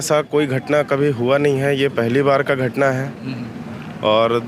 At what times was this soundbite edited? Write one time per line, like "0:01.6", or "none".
none